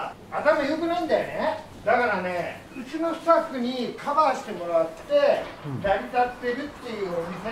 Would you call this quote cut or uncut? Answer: uncut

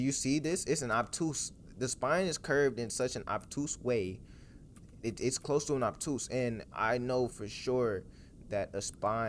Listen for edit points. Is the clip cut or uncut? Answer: uncut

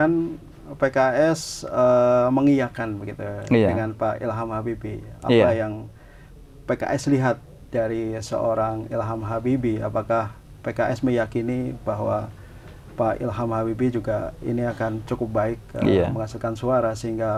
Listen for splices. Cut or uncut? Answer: uncut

